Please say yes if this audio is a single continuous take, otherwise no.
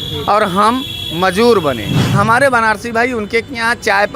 no